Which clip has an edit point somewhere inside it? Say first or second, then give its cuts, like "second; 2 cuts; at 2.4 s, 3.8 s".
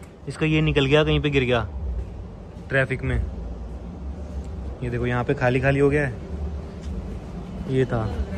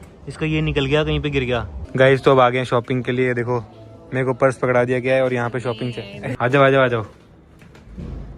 second; 2 cuts; at 1.8 s, 6.4 s